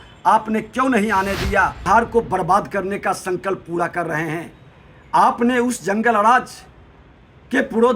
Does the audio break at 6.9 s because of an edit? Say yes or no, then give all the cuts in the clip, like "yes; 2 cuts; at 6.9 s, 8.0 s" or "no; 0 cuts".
no; 1 cut; at 1.8 s